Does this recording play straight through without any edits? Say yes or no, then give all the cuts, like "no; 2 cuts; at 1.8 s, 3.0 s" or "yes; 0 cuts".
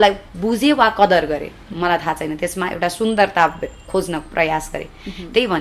yes; 0 cuts